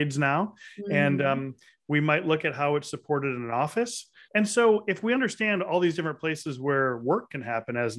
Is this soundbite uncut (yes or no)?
no